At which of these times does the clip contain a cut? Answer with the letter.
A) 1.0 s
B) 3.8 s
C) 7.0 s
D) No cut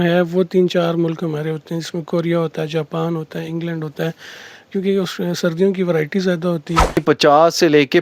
C